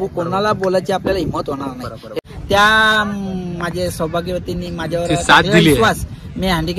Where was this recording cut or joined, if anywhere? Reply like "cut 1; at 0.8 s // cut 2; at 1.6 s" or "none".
cut 1; at 2.1 s